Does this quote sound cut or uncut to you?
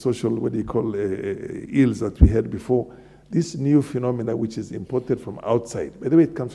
uncut